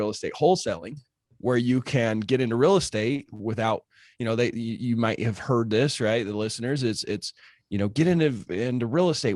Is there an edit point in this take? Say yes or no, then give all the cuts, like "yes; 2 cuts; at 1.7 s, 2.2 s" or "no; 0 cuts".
no; 0 cuts